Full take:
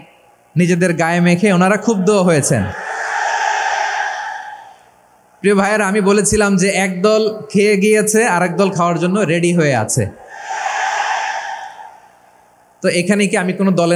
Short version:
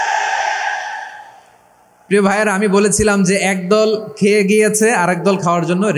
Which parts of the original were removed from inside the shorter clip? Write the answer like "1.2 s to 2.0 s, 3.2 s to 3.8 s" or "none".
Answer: none